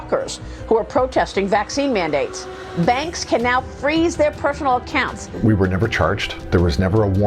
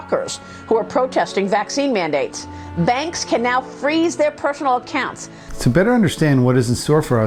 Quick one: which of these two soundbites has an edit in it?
first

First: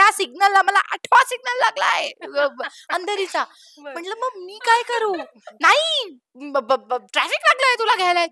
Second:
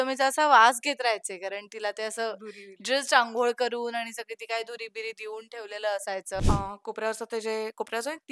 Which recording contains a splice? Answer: second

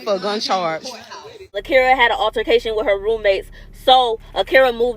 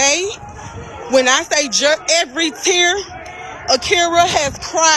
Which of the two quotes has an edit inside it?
first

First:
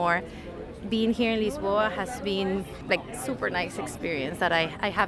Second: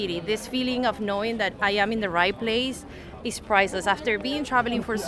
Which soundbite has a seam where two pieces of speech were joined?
first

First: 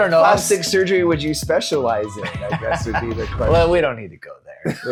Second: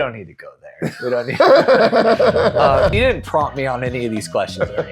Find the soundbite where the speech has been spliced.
second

